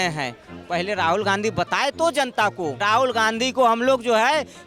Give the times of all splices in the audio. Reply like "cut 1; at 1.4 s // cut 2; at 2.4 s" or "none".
cut 1; at 2.8 s

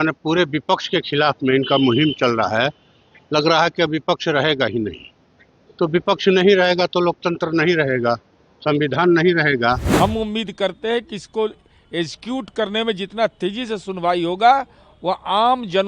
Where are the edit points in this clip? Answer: cut 1; at 9.9 s

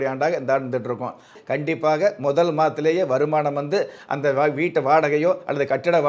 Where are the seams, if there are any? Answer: cut 1; at 1.4 s

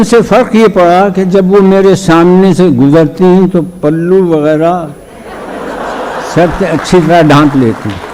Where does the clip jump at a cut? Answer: none

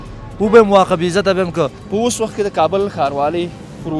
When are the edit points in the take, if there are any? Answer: cut 1; at 1.8 s

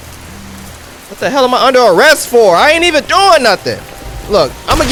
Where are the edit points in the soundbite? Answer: none

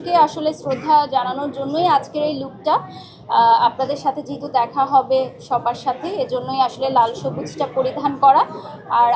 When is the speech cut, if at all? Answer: none

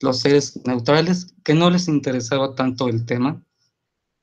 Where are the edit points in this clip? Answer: none

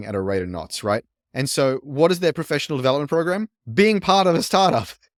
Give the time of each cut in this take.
none

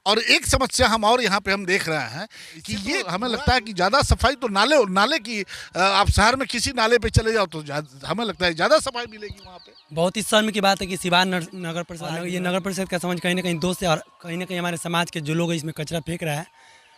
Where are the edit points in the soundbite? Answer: cut 1; at 3.0 s // cut 2; at 11.9 s

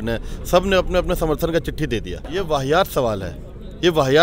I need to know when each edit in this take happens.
cut 1; at 2.2 s

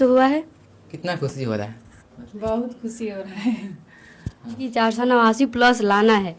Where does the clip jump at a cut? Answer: cut 1; at 0.9 s // cut 2; at 4.6 s

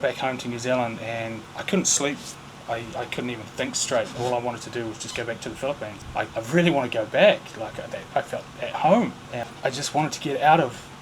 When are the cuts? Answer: cut 1; at 6.3 s // cut 2; at 9.3 s

